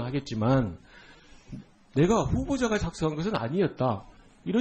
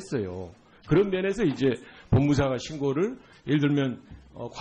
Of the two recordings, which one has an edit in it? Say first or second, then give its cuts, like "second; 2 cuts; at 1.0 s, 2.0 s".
first; 1 cut; at 1.6 s